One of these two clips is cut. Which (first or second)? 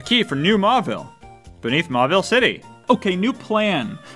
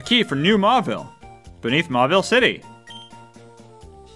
first